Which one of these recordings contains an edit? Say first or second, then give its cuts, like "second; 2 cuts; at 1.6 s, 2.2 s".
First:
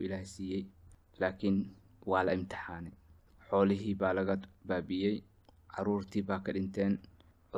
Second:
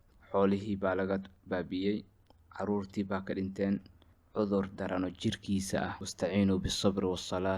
second; 1 cut; at 6.0 s